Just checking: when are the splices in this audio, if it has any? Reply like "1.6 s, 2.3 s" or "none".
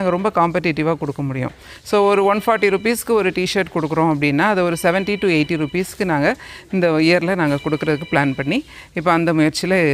none